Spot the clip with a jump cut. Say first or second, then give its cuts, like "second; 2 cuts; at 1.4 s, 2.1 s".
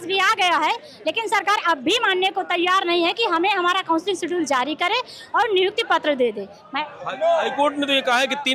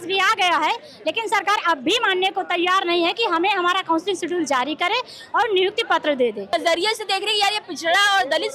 second; 1 cut; at 6.5 s